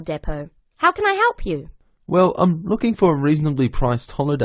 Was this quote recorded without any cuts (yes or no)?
yes